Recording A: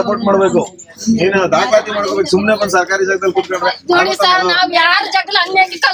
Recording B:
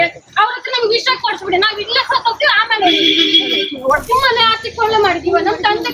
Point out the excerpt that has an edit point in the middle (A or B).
B